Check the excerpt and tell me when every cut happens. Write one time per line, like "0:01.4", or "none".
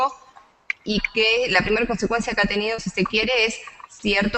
0:01.6

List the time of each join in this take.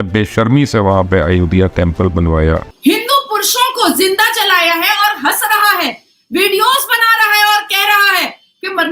0:02.7

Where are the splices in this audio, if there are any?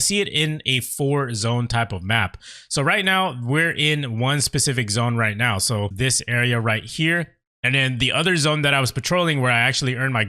0:05.9

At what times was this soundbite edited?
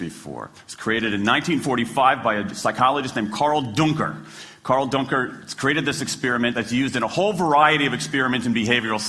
none

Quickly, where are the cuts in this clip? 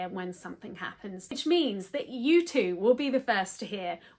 0:01.3

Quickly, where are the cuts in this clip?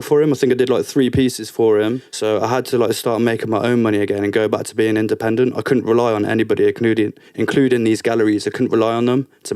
0:02.1

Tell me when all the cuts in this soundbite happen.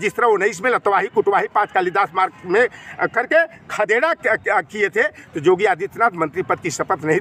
none

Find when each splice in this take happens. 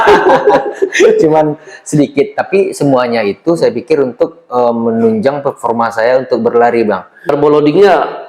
0:07.3

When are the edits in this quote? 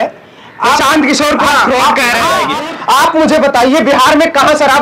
0:02.5

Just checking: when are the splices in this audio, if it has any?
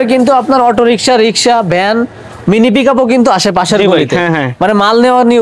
none

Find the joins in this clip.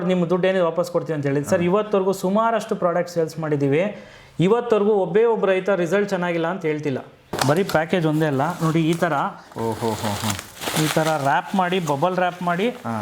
0:07.4

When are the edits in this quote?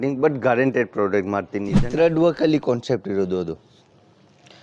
0:01.8

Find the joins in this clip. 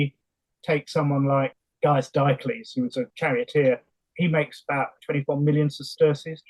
0:01.5
0:03.1
0:04.0
0:05.0

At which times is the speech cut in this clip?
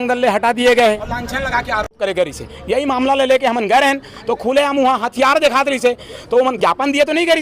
0:01.1

